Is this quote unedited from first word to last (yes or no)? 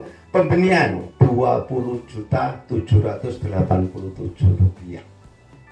no